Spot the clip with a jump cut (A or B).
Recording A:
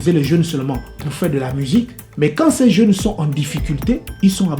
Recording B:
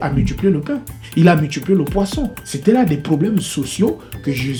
A